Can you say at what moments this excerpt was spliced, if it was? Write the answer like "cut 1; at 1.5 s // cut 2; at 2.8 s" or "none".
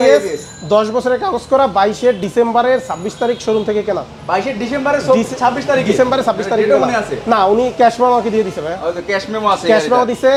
none